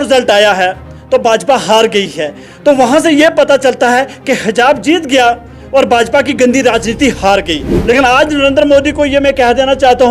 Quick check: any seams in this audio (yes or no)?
yes